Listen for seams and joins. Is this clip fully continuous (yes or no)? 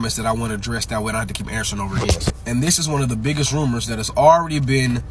no